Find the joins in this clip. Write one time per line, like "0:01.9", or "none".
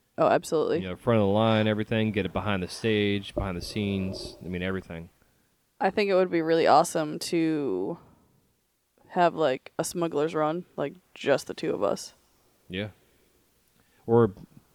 none